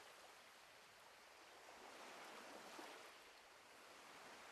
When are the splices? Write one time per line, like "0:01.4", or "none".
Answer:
none